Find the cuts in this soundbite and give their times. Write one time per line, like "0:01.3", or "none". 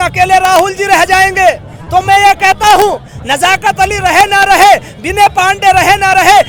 none